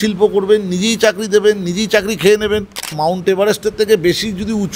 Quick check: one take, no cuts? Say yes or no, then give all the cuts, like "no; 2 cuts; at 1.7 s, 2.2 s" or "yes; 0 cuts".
no; 1 cut; at 3.0 s